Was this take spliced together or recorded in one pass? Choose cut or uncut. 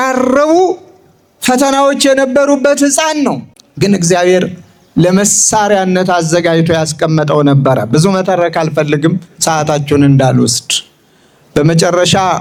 uncut